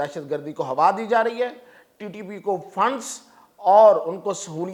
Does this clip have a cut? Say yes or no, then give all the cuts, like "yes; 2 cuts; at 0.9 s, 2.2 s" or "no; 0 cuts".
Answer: no; 0 cuts